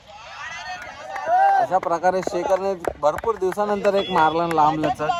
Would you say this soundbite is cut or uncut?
uncut